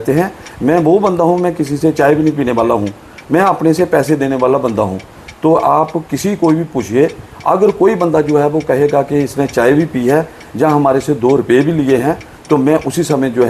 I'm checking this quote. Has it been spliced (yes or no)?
yes